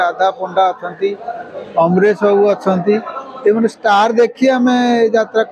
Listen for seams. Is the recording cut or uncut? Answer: uncut